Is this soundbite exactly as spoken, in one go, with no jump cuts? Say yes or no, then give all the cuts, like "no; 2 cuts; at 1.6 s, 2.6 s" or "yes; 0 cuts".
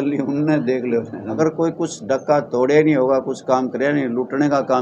no; 1 cut; at 1.3 s